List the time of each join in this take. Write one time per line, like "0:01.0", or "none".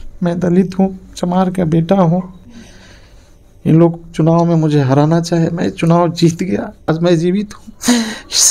0:06.9